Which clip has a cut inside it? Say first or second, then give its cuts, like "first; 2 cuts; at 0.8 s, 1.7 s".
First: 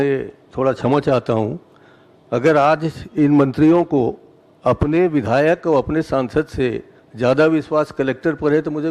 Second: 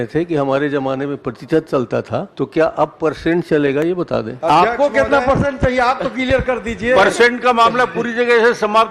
second; 2 cuts; at 2.3 s, 4.3 s